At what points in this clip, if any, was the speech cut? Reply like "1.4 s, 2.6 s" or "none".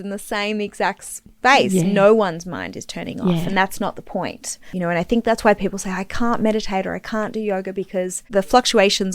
4.6 s, 8.3 s